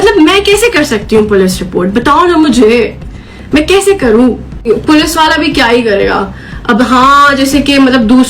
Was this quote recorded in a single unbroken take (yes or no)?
no